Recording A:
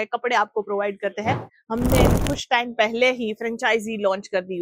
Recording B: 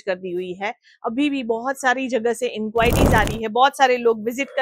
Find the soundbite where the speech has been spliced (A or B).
A